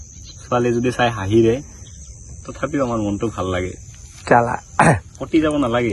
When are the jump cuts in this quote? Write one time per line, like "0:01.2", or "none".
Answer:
none